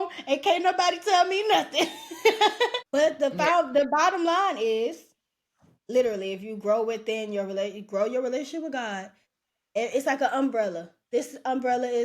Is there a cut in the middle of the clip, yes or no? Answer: yes